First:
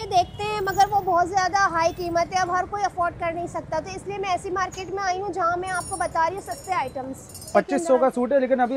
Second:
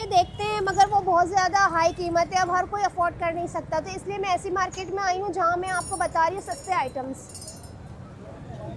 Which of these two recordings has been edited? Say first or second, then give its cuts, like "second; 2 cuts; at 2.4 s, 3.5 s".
first; 1 cut; at 7.4 s